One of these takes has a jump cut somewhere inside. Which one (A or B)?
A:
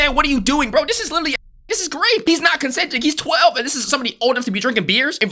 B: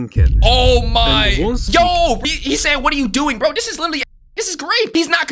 B